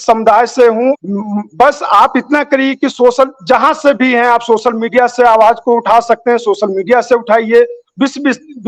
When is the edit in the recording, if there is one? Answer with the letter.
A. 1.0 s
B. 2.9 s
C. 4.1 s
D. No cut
A